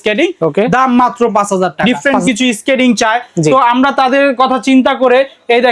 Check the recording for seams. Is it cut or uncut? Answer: cut